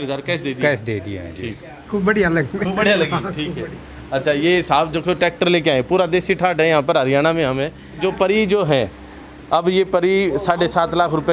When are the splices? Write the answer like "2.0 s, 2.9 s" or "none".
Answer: 1.9 s, 8.0 s